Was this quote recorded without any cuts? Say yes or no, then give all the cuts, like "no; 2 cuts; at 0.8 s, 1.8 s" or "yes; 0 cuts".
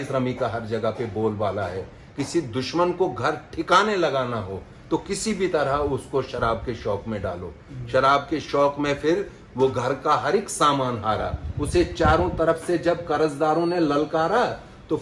yes; 0 cuts